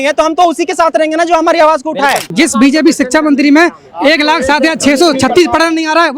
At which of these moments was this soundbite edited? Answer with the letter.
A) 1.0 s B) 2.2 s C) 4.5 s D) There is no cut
B